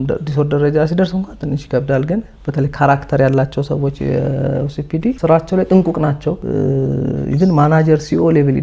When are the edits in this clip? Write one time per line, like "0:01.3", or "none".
0:05.2
0:06.4